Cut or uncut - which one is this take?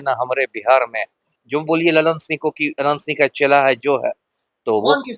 cut